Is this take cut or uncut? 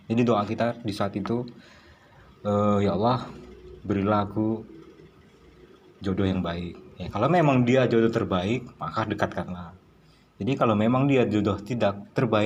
uncut